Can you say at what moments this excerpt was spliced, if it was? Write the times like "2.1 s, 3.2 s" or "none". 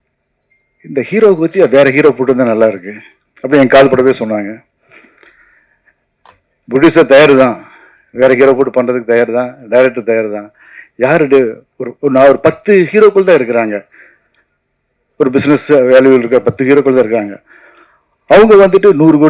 none

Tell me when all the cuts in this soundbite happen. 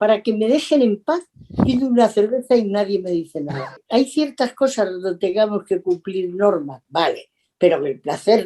3.8 s

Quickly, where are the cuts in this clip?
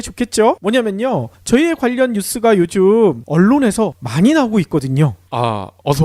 none

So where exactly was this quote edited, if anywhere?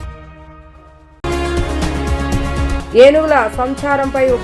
2.7 s

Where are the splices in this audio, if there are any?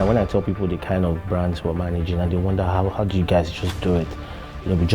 none

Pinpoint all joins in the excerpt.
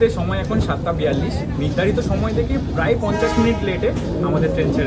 none

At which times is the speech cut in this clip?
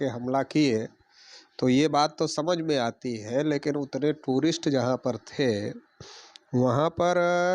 none

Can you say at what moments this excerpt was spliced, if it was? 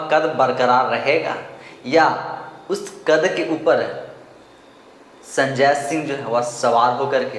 none

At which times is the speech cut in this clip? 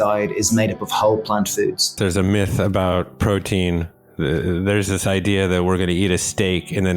1.9 s

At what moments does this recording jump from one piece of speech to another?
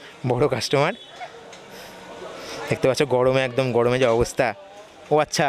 none

